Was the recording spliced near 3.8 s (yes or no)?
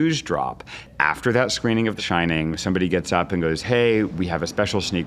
no